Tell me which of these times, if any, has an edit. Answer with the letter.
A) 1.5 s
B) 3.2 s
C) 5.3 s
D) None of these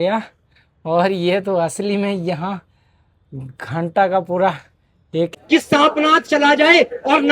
C